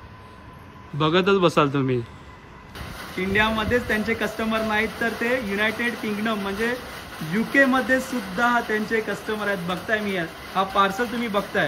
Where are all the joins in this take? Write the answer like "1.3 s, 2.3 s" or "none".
2.7 s